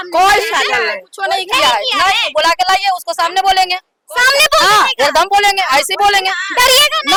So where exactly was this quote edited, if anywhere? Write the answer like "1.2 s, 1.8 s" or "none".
none

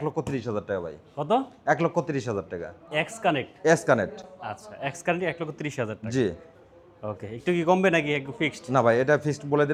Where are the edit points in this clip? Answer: none

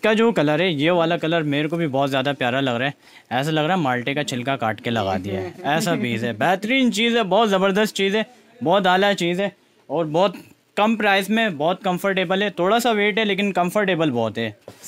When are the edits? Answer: none

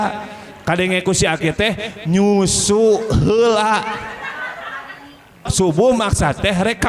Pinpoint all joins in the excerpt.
5.4 s

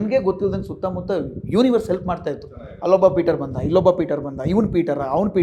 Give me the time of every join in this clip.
none

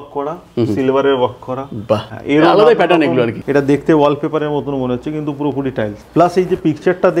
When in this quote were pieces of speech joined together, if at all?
2.1 s, 3.4 s, 6.0 s

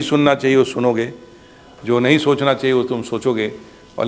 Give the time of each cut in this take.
none

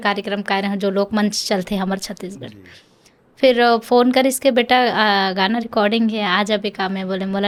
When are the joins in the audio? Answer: none

